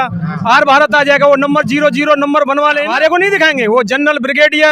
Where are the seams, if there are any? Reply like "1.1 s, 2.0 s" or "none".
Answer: 2.9 s